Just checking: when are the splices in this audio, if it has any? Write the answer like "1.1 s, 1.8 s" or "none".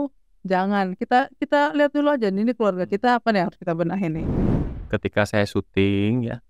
4.4 s